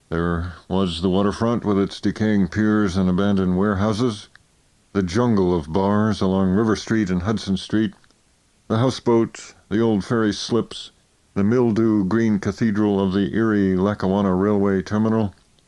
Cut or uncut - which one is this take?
uncut